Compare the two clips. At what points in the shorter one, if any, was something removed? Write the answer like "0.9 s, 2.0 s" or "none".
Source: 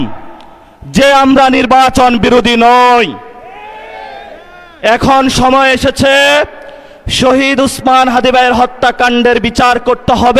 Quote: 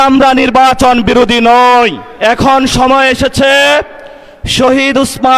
2.0 s